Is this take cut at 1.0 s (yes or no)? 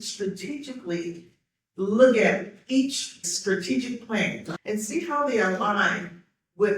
no